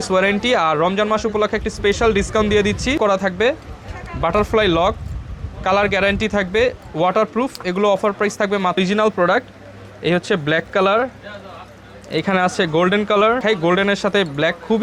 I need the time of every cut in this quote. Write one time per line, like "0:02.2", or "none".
0:03.0
0:08.8
0:13.4